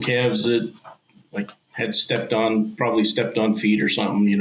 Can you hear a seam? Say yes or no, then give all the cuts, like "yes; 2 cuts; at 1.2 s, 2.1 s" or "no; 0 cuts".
no; 0 cuts